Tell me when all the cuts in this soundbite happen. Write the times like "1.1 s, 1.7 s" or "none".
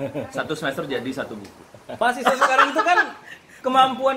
1.9 s